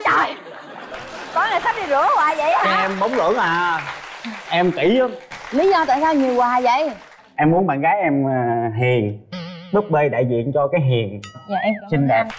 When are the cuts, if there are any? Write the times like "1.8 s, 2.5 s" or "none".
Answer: 5.3 s